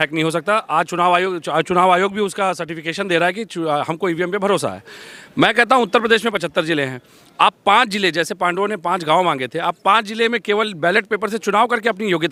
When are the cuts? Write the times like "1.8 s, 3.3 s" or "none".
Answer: none